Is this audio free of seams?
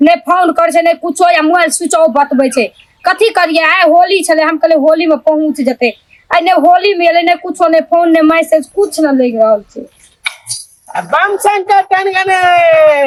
yes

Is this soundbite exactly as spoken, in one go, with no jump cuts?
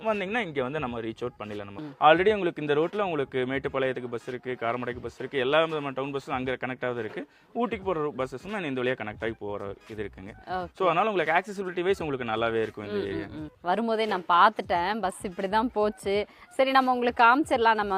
no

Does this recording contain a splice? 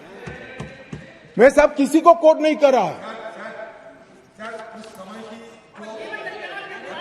no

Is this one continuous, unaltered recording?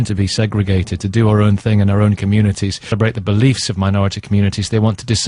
yes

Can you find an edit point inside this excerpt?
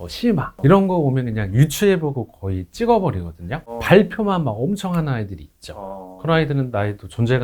no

